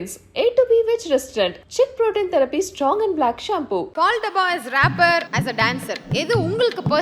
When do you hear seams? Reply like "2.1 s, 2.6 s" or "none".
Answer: 3.9 s, 5.3 s